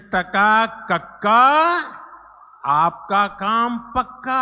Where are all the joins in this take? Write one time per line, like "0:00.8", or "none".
none